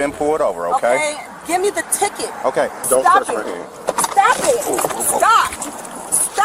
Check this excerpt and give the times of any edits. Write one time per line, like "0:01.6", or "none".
0:02.8